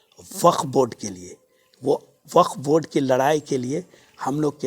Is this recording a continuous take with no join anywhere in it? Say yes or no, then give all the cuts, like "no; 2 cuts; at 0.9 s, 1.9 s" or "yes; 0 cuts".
yes; 0 cuts